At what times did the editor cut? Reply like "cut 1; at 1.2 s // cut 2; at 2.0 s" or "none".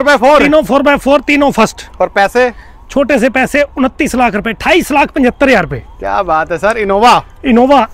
none